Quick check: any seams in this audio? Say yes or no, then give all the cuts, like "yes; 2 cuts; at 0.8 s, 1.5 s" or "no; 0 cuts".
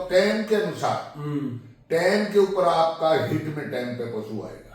no; 0 cuts